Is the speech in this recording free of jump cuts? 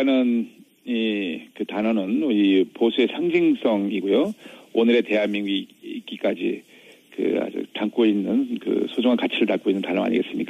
yes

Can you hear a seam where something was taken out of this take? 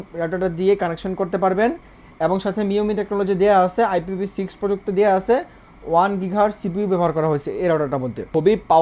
no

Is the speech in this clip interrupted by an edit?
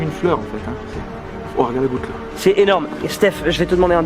no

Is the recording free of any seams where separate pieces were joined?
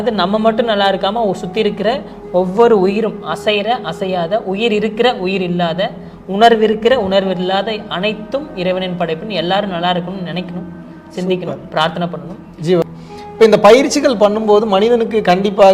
no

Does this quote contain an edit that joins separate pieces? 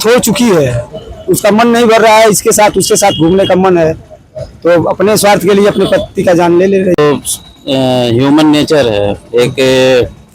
yes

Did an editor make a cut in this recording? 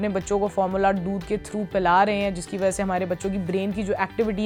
no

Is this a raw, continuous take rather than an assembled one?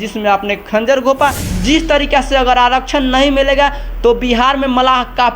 no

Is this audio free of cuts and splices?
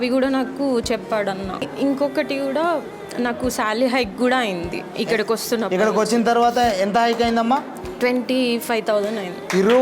no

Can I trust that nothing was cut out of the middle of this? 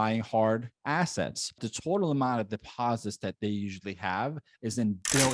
no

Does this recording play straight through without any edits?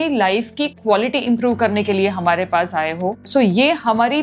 yes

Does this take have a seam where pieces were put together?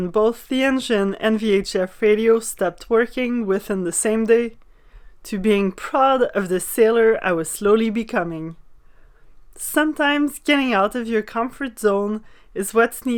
no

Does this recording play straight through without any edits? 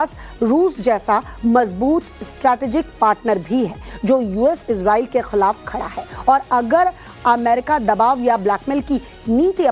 yes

